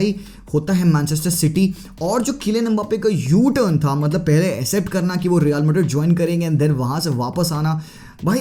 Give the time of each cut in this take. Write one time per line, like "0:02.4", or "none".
none